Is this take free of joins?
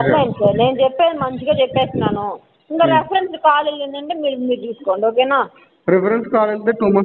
yes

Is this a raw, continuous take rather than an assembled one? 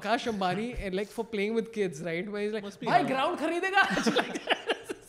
yes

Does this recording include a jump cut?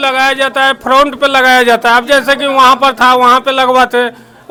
no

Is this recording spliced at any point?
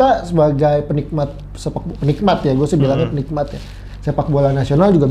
no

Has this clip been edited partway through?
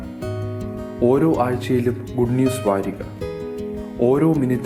no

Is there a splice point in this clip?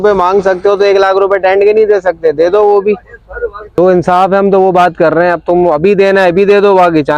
yes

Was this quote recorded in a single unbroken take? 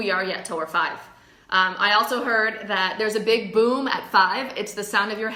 yes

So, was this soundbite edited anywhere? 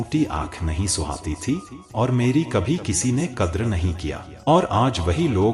yes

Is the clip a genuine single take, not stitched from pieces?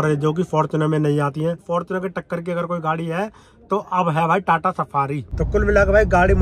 no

